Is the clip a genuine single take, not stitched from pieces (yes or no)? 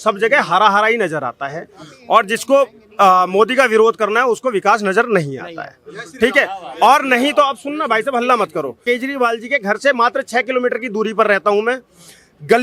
no